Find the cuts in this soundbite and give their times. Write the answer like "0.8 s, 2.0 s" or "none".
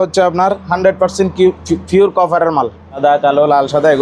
3.0 s